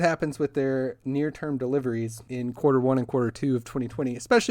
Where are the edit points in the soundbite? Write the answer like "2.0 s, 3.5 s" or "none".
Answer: 2.2 s